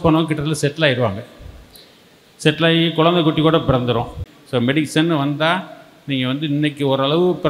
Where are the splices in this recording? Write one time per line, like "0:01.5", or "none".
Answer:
0:04.2